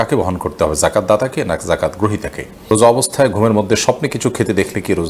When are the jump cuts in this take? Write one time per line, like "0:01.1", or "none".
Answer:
0:02.7